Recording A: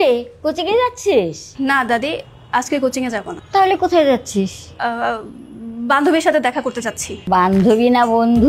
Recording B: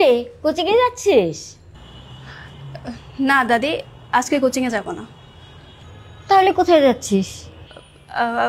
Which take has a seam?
A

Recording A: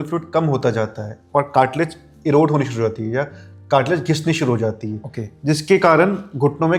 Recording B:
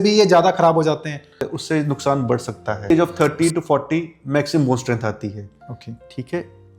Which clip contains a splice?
B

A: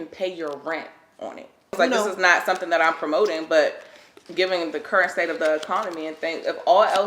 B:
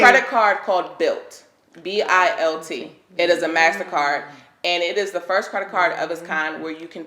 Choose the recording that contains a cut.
A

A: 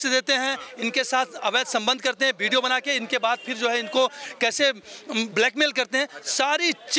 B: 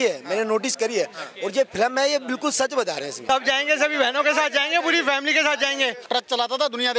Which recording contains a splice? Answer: B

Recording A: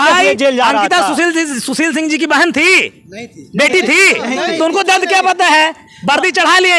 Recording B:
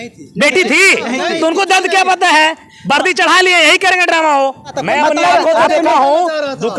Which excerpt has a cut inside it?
B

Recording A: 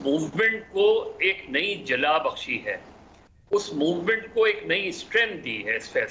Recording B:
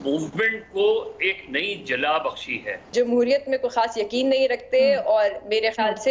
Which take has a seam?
B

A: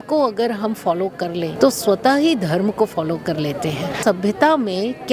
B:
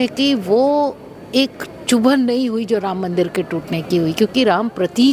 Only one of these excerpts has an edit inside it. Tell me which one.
A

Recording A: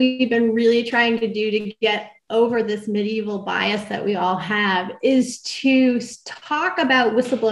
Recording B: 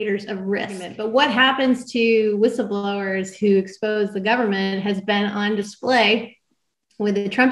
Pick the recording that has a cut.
B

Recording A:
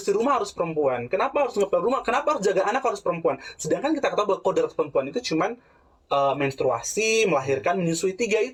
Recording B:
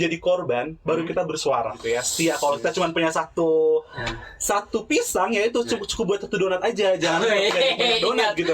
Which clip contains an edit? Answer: B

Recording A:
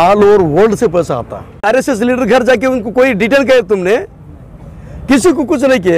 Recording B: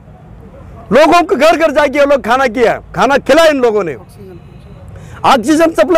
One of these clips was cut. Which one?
A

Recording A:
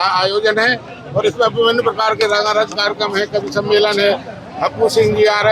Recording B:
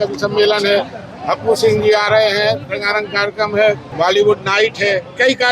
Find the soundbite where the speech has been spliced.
B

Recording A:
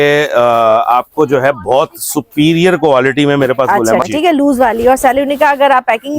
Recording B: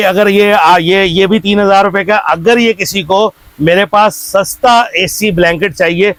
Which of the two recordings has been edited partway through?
A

